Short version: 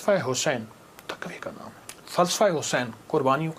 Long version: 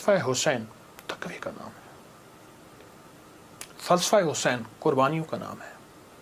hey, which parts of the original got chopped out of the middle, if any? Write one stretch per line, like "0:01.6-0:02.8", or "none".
0:01.9-0:03.6